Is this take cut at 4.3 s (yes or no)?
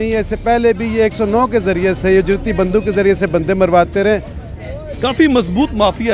no